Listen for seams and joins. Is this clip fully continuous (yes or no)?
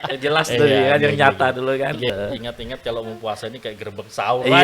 no